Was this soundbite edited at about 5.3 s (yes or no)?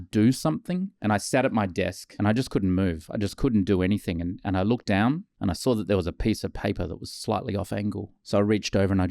no